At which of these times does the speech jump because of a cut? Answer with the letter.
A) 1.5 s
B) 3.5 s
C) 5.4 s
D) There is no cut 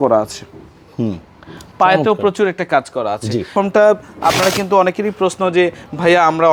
B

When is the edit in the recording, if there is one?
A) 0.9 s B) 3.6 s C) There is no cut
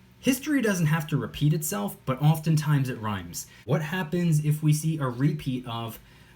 B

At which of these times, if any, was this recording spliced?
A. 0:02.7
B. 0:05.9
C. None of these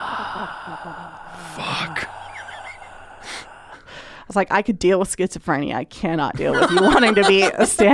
C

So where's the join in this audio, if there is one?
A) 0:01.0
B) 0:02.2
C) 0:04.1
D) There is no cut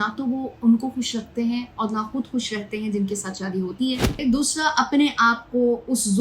C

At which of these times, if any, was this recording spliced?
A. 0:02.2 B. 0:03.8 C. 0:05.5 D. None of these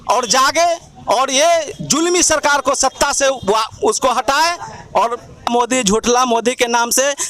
C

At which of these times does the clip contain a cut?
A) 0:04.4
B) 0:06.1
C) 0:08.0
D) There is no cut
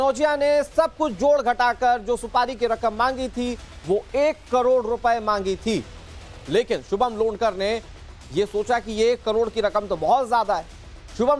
A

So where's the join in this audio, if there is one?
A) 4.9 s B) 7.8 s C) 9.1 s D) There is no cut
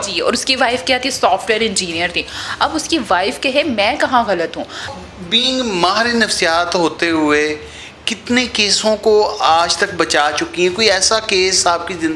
A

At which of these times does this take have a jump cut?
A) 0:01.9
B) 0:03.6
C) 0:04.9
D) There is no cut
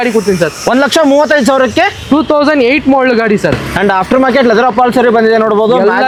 D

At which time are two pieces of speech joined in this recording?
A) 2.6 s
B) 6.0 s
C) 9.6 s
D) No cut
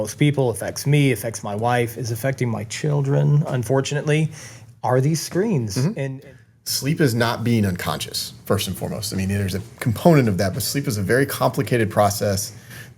B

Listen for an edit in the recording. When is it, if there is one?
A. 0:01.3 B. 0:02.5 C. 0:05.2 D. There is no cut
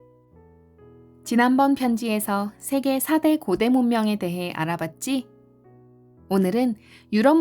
A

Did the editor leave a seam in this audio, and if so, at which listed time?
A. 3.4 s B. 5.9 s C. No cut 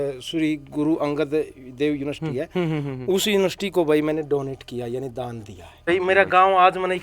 B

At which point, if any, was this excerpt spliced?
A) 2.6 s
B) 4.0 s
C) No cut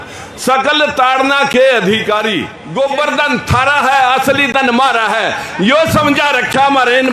A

